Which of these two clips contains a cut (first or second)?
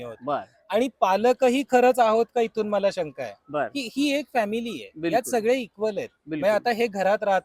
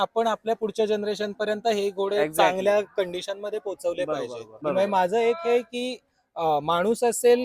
second